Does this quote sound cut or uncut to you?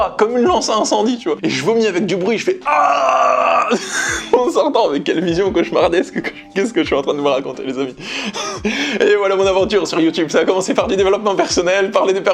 uncut